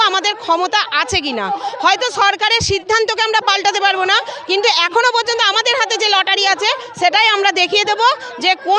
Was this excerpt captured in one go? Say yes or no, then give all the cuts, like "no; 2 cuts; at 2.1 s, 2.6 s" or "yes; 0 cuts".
yes; 0 cuts